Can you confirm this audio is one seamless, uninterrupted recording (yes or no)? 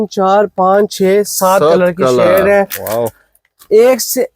yes